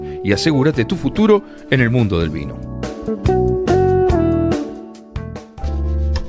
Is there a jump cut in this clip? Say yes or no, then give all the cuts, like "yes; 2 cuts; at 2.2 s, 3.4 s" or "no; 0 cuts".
yes; 1 cut; at 5.4 s